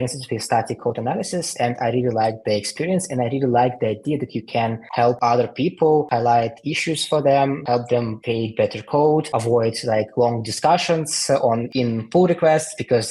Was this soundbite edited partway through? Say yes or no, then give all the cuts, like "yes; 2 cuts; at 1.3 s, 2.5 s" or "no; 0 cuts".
no; 0 cuts